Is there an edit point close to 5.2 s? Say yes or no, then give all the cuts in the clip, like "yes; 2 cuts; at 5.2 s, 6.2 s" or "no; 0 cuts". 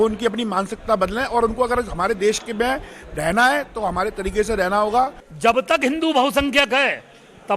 yes; 1 cut; at 5.2 s